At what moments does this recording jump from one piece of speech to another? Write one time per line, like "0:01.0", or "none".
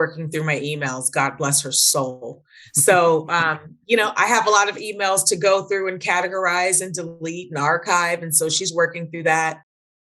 none

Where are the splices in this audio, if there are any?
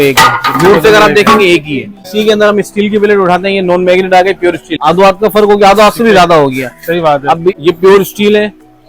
0:02.0
0:04.7
0:07.6

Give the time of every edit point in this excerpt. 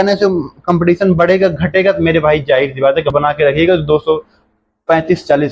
0:03.1

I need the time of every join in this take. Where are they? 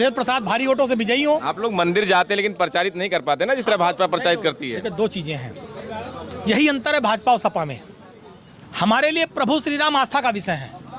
none

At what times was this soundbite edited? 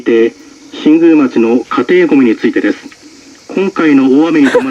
none

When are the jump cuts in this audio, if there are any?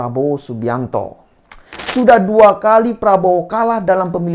0:01.9

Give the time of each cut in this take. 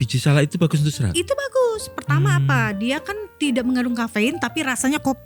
none

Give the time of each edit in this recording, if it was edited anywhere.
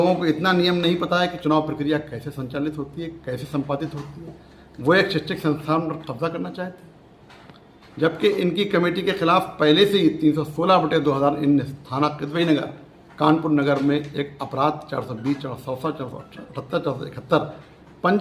none

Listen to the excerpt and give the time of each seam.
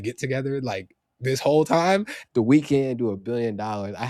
0:02.2

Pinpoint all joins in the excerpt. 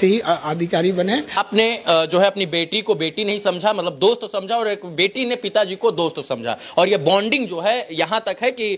0:01.4

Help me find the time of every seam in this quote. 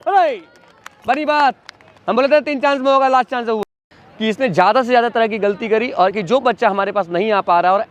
0:03.6
0:06.2

